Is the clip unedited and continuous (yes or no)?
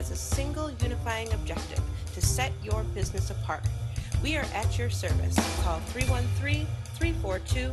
yes